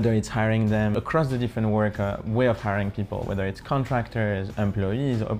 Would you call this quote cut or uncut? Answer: cut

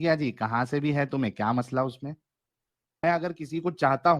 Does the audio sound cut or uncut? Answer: cut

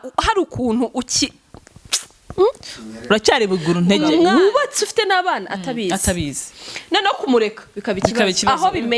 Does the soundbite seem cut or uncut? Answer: cut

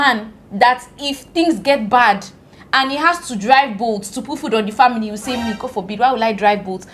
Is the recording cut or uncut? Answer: uncut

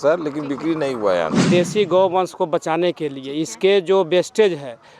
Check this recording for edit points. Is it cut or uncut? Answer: cut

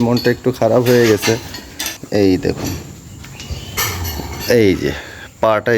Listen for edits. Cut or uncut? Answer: cut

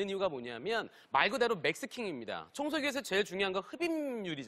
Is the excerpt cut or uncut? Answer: uncut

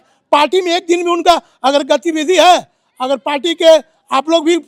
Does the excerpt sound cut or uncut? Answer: uncut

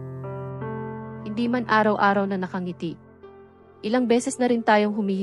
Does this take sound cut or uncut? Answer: uncut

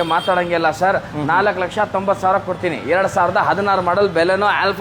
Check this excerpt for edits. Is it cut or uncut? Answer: uncut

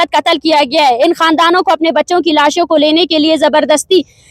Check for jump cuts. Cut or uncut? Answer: uncut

